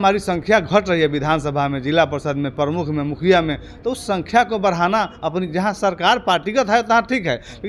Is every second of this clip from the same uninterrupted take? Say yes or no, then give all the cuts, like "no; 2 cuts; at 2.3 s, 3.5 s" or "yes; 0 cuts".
yes; 0 cuts